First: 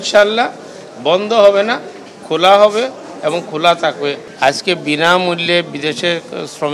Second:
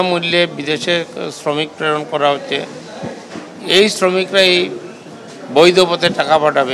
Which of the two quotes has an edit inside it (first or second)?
first